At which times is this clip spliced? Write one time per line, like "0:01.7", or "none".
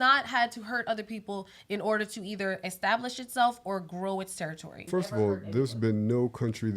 0:04.8

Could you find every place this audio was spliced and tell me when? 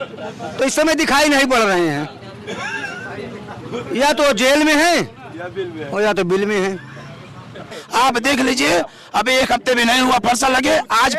0:07.7

